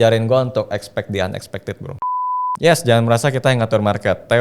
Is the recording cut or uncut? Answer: cut